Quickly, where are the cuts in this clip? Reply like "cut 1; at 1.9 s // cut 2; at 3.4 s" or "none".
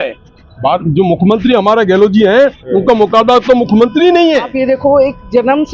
cut 1; at 4.5 s